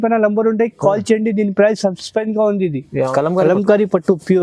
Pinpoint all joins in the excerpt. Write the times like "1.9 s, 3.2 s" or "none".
3.1 s